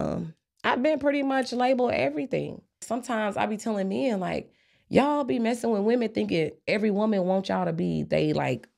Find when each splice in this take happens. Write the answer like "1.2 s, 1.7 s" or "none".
2.8 s